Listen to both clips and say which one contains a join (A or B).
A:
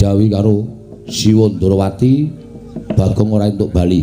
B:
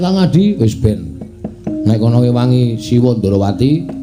A